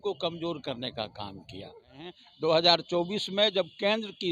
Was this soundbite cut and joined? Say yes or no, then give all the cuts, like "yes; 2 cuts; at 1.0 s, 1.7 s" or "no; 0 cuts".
yes; 1 cut; at 2.2 s